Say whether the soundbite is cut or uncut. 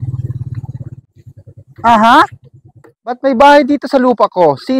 cut